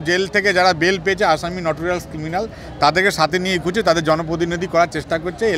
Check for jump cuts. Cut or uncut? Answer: uncut